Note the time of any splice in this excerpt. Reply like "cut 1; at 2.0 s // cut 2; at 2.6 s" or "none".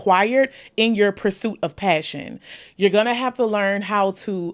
cut 1; at 2.6 s